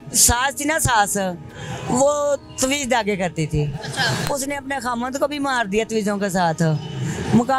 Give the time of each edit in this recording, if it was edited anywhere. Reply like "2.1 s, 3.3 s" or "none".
none

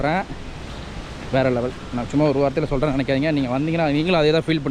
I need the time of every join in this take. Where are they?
none

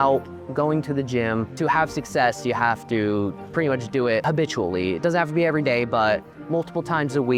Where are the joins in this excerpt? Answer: 1.5 s, 4.2 s

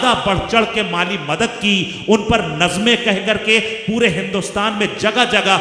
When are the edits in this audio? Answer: none

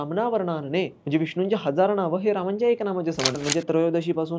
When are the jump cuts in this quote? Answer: 1.0 s, 3.4 s

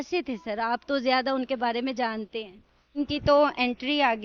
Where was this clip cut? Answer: 3.0 s

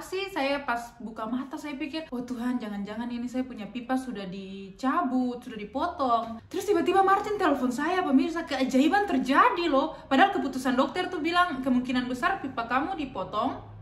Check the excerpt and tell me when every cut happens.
2.1 s, 6.4 s

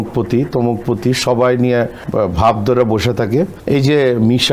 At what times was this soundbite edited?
2.0 s, 3.6 s

